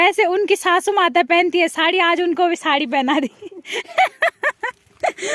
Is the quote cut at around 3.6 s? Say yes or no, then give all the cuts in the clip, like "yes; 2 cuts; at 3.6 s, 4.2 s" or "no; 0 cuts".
no; 0 cuts